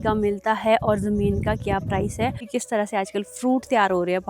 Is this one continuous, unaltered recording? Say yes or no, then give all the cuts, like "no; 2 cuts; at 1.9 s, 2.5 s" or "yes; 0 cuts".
no; 1 cut; at 2.4 s